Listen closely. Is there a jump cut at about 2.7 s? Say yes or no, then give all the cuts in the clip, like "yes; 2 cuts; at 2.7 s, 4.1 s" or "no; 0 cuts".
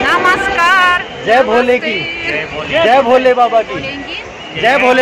no; 0 cuts